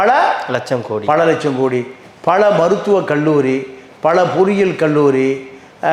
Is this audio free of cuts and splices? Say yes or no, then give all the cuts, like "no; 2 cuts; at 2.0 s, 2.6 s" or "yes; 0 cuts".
yes; 0 cuts